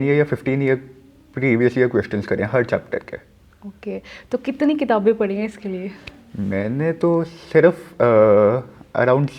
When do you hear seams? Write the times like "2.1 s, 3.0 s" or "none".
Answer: none